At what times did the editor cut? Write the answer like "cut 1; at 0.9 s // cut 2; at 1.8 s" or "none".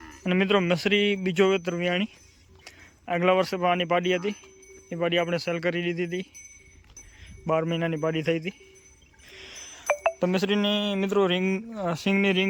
none